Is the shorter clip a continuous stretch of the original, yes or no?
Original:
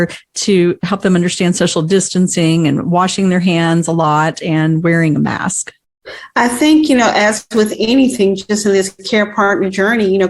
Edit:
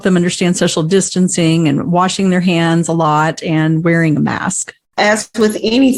no